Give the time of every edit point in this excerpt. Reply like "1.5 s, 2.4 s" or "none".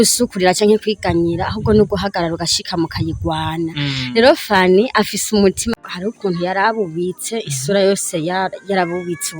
5.7 s